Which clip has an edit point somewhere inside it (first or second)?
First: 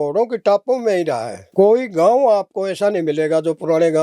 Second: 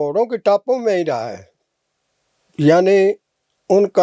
first